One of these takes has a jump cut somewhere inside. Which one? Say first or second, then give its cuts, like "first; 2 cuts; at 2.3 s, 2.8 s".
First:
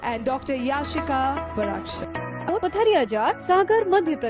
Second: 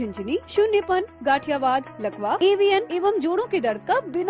first; 1 cut; at 2.5 s